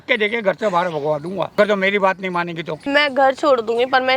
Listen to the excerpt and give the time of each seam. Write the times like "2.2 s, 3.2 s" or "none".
1.6 s, 2.8 s